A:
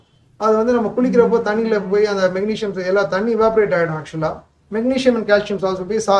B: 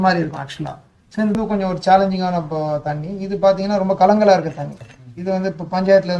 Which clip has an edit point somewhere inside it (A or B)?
B